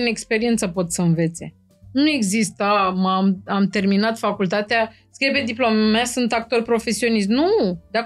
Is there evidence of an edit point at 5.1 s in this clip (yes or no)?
no